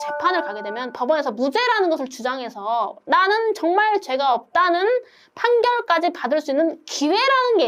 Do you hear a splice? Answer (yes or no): no